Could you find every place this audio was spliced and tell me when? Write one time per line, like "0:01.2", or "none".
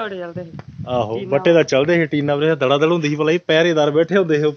none